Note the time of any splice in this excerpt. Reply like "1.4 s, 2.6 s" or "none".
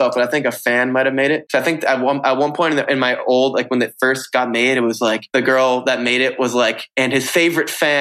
1.4 s, 5.2 s, 6.8 s